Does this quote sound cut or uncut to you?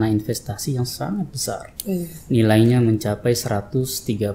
uncut